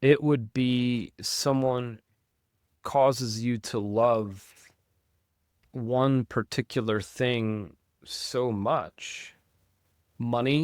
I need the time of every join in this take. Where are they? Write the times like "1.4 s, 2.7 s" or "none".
none